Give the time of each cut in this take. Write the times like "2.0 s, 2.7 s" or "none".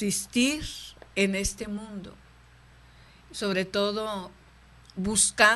none